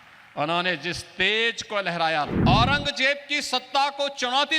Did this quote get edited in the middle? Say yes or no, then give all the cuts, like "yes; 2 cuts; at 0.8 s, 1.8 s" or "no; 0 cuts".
yes; 1 cut; at 2.3 s